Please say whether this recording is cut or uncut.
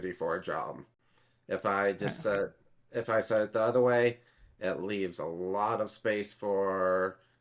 uncut